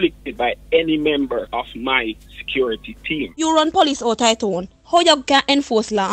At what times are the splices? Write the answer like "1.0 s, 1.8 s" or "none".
3.3 s